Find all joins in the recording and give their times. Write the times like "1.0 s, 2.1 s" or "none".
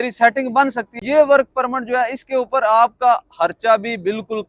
1.0 s